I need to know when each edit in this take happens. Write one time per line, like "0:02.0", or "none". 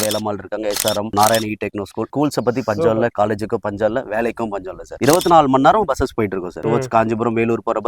0:01.1
0:05.0
0:06.5